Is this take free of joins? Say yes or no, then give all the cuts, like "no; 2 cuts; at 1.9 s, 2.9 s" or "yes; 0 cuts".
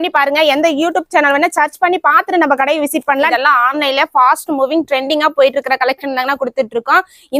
no; 1 cut; at 3.3 s